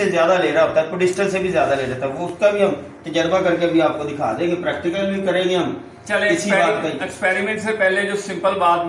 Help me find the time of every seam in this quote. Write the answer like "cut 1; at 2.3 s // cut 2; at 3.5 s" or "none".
none

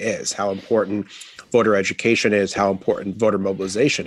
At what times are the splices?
cut 1; at 3.1 s

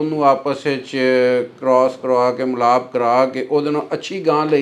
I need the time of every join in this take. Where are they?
none

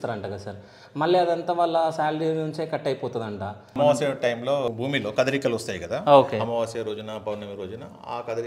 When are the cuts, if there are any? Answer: cut 1; at 3.7 s // cut 2; at 4.7 s

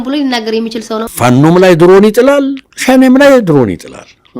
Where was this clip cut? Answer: cut 1; at 1.1 s

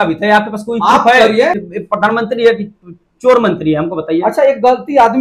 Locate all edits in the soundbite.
cut 1; at 1.6 s

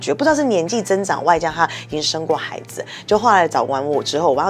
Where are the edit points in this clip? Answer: none

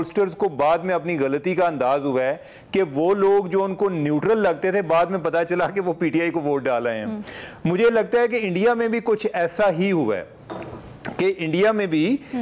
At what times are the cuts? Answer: none

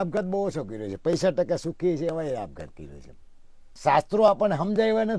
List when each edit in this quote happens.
cut 1; at 3.6 s

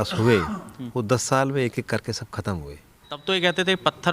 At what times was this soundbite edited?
cut 1; at 3.2 s

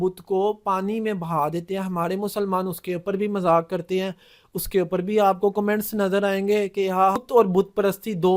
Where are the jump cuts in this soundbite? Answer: cut 1; at 7.2 s

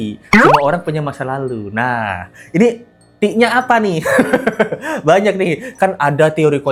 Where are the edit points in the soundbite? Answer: none

